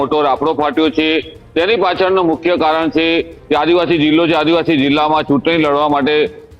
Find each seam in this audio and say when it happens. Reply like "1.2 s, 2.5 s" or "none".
none